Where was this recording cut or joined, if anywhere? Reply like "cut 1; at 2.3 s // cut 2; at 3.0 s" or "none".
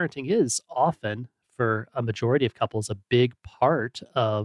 none